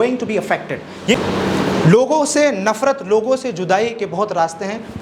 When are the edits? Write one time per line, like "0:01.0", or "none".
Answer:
0:01.1